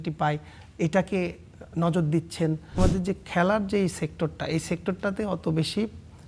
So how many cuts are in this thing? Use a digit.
1